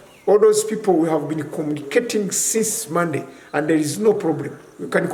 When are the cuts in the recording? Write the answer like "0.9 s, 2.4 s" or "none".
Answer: none

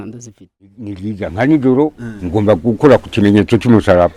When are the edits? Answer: 1.1 s

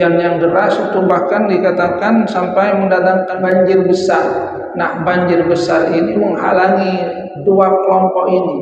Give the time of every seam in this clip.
3.4 s

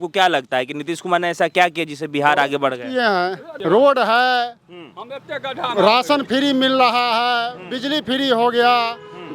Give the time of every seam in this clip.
3.5 s

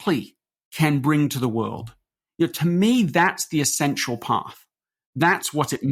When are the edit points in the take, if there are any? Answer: none

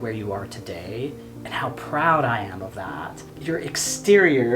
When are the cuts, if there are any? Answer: 1.3 s, 3.3 s

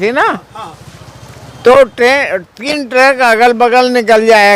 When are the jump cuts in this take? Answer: none

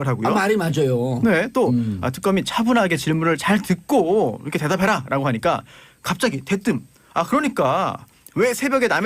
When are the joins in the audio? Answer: 6.4 s

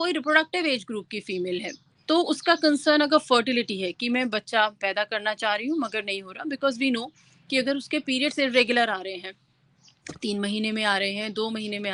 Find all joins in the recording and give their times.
none

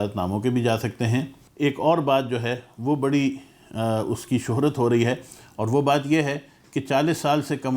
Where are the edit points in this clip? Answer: 1.4 s

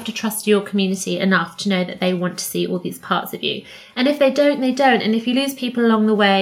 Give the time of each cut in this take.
none

